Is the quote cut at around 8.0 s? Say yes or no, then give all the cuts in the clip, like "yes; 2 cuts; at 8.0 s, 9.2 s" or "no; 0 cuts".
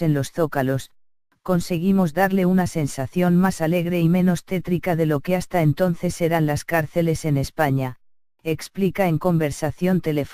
yes; 1 cut; at 8.0 s